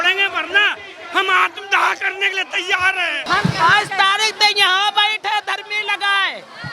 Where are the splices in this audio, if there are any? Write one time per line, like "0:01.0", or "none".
0:03.2